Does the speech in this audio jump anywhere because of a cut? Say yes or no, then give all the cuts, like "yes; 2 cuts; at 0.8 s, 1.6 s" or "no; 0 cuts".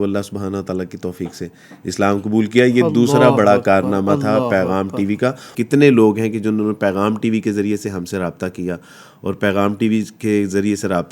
no; 0 cuts